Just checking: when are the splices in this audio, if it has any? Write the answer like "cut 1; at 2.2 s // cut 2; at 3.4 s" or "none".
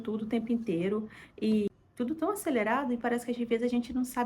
none

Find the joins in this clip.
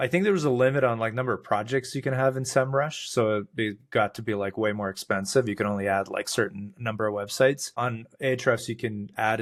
none

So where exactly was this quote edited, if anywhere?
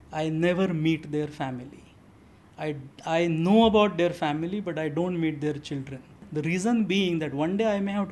cut 1; at 6.2 s

